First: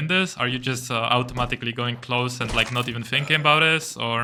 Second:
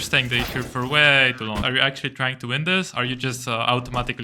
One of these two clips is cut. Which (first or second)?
second